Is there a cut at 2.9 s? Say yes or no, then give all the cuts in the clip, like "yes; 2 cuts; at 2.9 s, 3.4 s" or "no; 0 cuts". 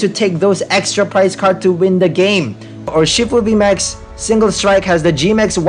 yes; 1 cut; at 2.9 s